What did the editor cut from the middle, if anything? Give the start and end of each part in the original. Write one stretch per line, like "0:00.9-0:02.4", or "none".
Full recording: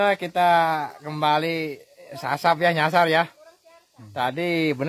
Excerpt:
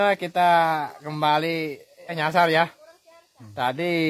0:02.2-0:02.8